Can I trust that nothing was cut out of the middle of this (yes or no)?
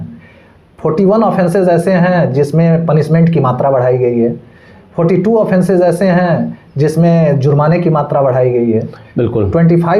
yes